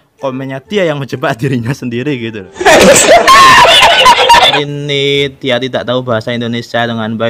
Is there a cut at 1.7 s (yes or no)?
no